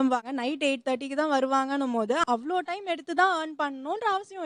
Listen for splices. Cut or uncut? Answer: uncut